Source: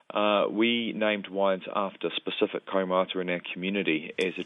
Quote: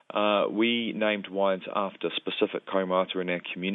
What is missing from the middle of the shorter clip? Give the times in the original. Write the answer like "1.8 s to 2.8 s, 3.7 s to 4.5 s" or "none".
none